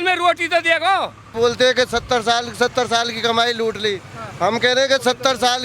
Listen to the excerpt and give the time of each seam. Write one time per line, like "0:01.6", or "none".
0:01.3

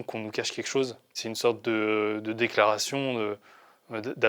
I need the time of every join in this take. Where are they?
0:01.2

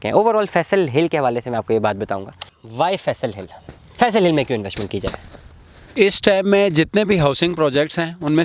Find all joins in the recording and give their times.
0:02.5

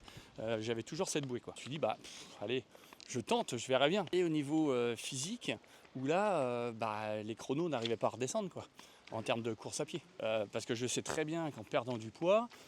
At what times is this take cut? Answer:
0:01.6
0:04.1
0:10.0

